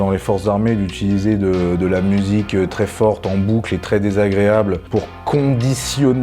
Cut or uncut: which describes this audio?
uncut